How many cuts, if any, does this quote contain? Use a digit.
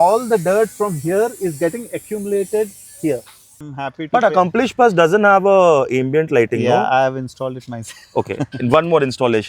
1